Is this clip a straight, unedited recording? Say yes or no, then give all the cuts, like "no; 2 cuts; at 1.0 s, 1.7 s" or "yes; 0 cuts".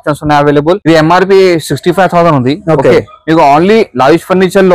yes; 0 cuts